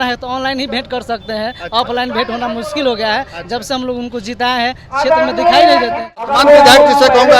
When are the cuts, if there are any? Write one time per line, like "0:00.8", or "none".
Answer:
0:06.3